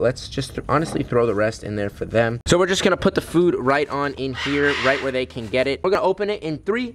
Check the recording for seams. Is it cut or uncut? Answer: cut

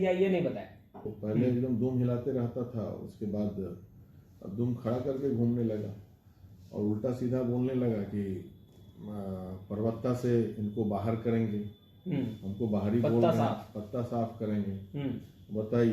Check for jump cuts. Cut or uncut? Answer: cut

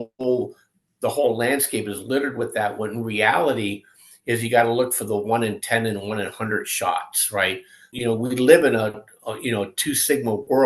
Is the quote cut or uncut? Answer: cut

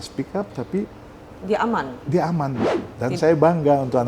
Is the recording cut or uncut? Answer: cut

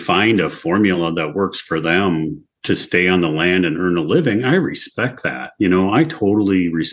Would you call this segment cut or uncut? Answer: uncut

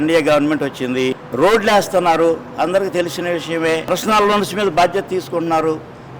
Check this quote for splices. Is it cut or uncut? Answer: cut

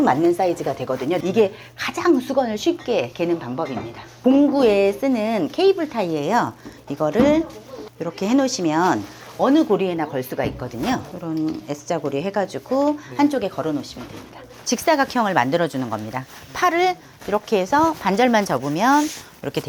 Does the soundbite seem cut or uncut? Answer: cut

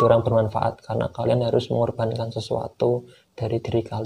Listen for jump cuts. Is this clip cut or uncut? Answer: uncut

